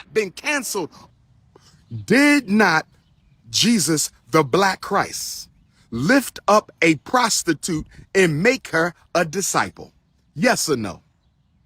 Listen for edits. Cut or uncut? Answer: cut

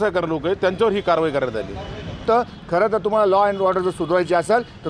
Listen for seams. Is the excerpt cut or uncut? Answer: cut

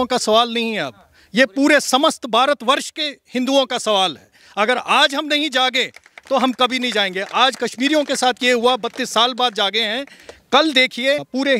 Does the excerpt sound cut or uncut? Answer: uncut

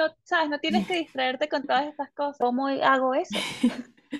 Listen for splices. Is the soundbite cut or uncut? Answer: cut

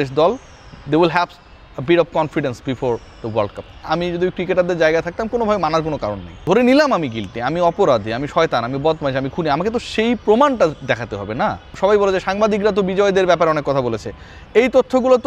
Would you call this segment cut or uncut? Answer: cut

